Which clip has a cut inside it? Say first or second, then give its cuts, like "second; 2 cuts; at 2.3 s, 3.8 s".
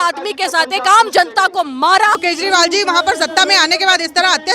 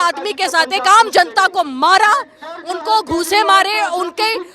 first; 1 cut; at 2.2 s